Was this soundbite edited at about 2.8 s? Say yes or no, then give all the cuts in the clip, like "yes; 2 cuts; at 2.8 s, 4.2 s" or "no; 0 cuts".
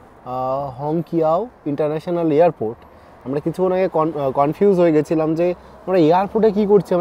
no; 0 cuts